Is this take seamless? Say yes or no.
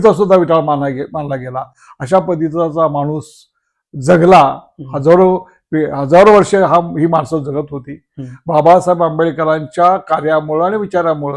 yes